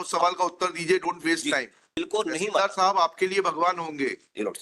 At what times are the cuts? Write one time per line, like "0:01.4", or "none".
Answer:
0:01.9